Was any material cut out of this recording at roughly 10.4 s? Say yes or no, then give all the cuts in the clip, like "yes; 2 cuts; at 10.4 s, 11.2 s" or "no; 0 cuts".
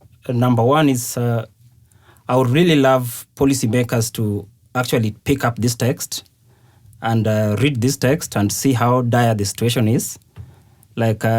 no; 0 cuts